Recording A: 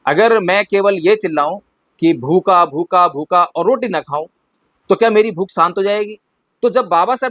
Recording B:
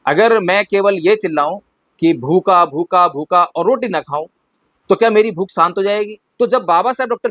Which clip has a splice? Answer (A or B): B